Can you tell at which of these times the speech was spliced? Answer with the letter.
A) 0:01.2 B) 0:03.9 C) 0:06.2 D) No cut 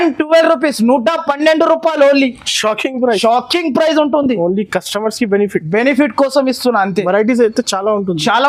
D